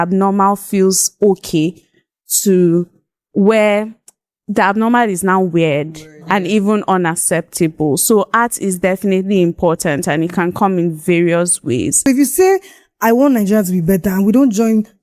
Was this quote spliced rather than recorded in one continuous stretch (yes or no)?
yes